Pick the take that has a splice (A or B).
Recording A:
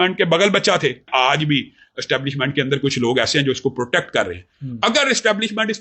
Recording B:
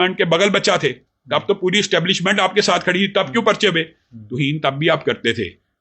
A